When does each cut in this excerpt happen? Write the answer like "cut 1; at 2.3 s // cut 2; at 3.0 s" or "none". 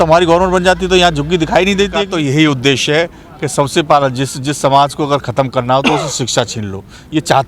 cut 1; at 2.1 s